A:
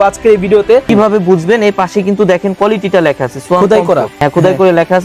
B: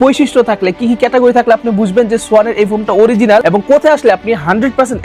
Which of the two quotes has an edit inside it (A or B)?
A